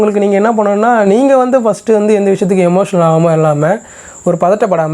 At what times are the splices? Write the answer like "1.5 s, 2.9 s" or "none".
none

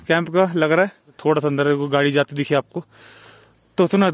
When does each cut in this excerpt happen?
1.1 s

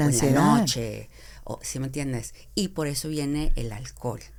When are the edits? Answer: none

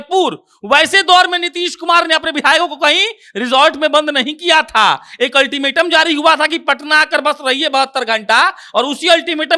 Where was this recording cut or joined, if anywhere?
none

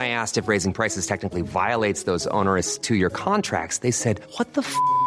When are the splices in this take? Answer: none

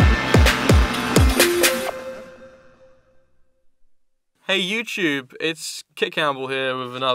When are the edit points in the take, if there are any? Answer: 5.6 s

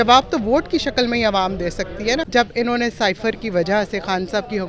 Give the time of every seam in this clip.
2.3 s

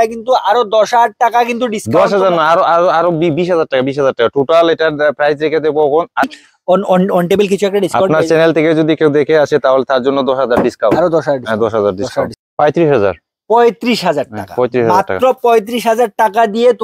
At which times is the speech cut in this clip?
6.2 s, 12.4 s

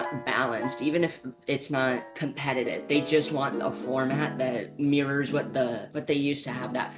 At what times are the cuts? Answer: none

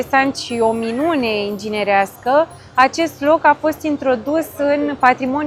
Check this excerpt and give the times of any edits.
none

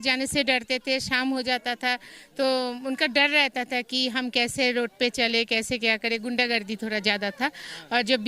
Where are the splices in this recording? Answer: none

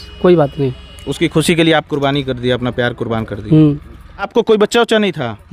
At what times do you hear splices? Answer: none

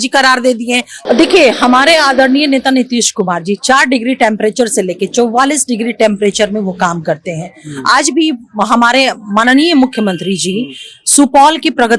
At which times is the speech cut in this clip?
0.9 s

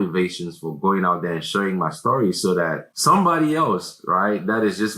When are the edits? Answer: 2.9 s

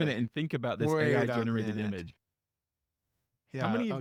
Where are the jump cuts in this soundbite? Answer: none

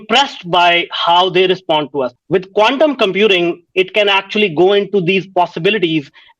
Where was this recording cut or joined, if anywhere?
2.1 s

